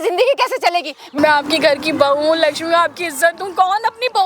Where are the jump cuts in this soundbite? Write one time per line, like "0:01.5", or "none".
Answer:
0:01.1